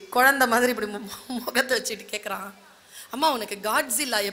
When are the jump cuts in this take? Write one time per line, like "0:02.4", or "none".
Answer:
none